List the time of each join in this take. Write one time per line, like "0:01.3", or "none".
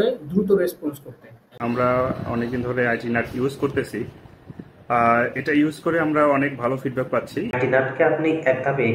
0:01.5
0:07.6